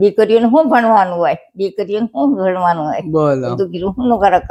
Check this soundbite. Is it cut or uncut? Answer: uncut